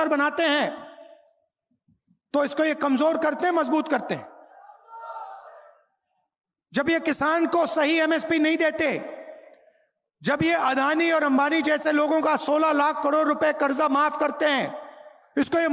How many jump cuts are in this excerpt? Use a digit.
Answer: 0